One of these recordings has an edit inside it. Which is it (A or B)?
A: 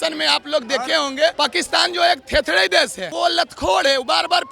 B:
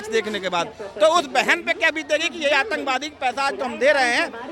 A